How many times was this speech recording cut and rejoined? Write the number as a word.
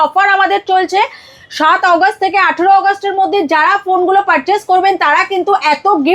zero